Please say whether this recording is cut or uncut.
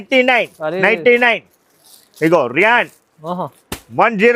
uncut